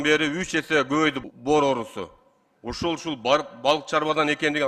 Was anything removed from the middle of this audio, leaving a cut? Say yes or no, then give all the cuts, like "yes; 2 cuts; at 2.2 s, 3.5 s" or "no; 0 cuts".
yes; 1 cut; at 1.2 s